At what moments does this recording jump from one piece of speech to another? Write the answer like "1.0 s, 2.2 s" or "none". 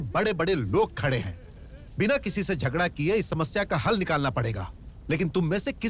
none